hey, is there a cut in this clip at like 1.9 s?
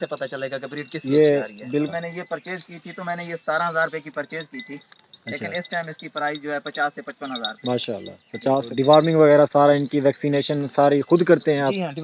yes; 2 cuts; at 1.9 s, 8.7 s

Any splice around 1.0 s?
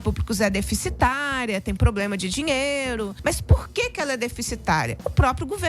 no; 1 cut; at 3.2 s

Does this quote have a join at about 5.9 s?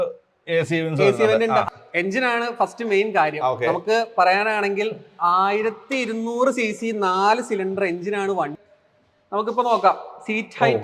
no; 2 cuts; at 1.6 s, 8.5 s

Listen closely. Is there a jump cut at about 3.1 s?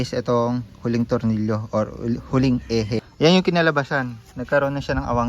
yes; 1 cut; at 3.1 s

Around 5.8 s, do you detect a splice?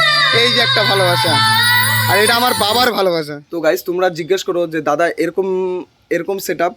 no; 1 cut; at 3.4 s

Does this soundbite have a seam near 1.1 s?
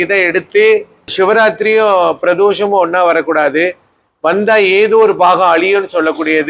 yes; 1 cut; at 1.1 s

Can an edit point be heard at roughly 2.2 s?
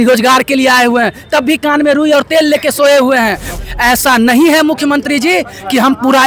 no; 1 cut; at 3.5 s

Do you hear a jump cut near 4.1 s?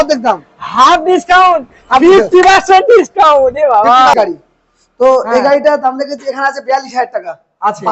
yes; 1 cut; at 4.1 s

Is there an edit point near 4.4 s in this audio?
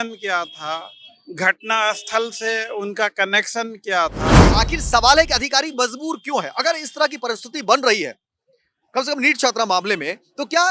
yes; 1 cut; at 4.4 s

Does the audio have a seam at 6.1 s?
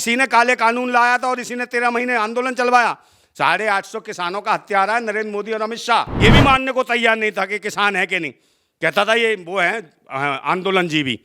yes; 1 cut; at 6.1 s

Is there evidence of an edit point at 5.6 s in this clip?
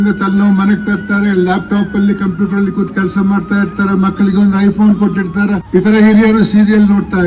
yes; 1 cut; at 5.6 s

